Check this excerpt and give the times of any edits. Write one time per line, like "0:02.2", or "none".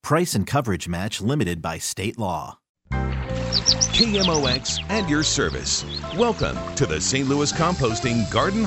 0:02.9